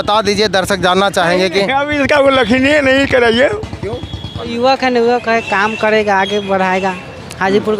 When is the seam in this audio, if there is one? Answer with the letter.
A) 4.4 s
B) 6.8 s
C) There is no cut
A